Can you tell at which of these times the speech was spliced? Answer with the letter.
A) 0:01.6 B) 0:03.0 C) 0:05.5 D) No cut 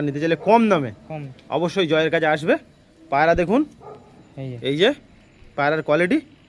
D